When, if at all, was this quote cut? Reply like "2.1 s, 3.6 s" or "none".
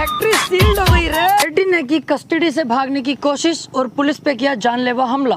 1.4 s